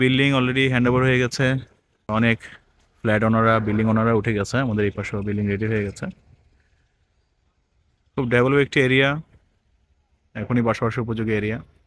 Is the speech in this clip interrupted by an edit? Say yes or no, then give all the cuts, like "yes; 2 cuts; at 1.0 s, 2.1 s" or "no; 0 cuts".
yes; 1 cut; at 2.1 s